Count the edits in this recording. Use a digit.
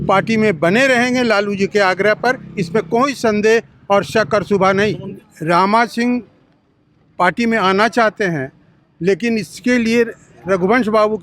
0